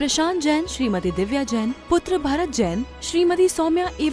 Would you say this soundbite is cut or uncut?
uncut